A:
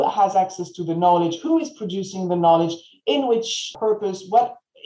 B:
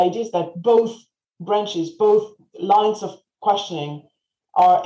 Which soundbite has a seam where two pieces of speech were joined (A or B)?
A